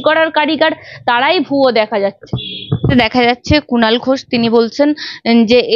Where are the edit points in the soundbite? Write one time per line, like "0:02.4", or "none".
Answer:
0:02.9